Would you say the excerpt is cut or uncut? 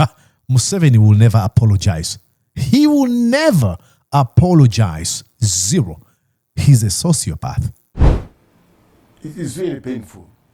uncut